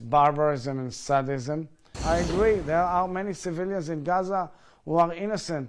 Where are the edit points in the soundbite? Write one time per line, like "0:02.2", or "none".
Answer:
0:01.9